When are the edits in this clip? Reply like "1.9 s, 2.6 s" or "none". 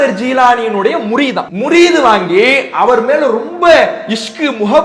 1.5 s